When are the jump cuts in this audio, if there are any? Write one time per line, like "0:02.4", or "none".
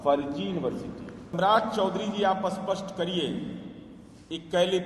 0:01.3